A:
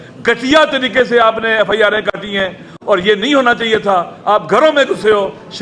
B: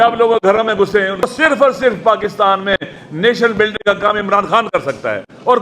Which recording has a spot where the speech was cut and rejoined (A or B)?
B